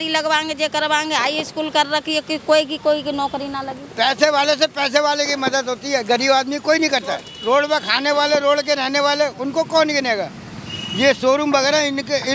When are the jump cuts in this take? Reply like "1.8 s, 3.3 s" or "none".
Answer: 3.8 s, 7.3 s